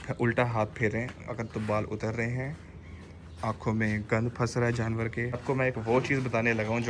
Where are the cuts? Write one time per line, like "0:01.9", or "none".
0:05.4